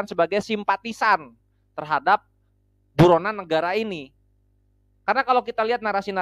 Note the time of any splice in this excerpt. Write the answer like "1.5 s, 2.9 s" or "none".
none